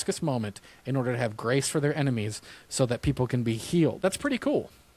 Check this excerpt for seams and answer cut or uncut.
cut